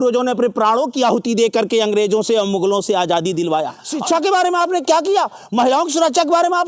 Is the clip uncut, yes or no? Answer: no